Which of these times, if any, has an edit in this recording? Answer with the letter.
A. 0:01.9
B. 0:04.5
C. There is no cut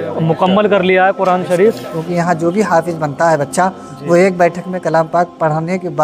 A